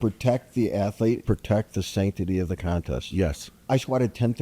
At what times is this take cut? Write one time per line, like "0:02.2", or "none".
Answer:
0:01.2
0:03.5